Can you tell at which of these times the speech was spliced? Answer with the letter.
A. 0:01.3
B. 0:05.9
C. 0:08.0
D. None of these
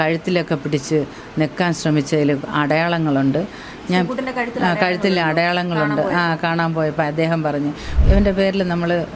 C